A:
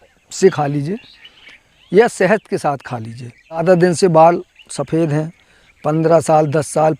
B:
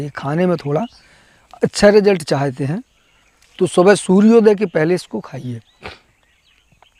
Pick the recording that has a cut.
A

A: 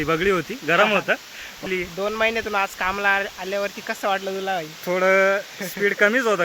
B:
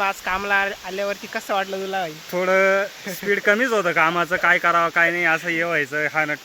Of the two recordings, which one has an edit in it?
A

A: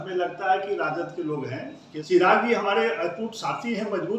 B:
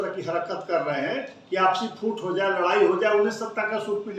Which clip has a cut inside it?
A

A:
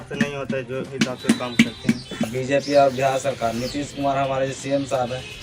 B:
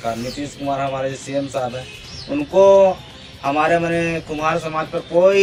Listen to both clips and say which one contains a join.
A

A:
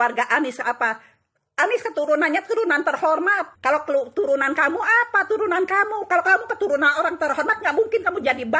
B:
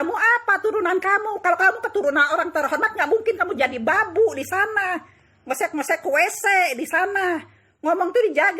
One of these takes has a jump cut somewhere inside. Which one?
A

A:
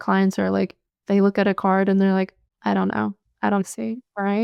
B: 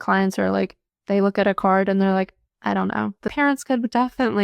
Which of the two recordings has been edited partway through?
B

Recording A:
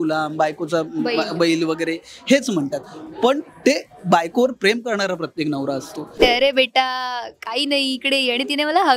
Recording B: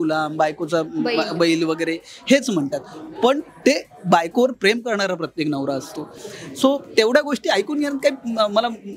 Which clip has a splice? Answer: A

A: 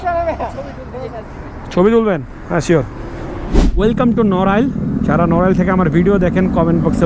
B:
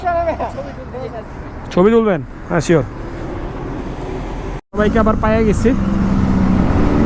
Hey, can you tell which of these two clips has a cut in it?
A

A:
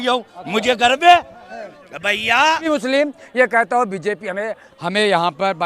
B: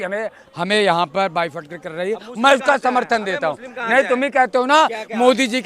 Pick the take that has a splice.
A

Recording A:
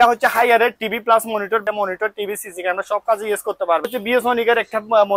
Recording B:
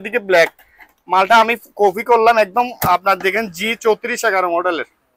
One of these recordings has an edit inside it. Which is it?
A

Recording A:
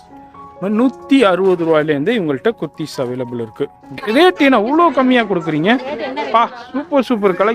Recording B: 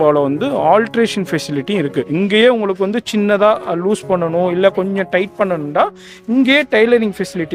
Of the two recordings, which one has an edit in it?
A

